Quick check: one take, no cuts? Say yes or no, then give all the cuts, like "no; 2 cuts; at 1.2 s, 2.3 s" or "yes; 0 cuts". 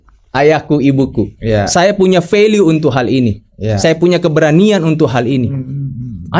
yes; 0 cuts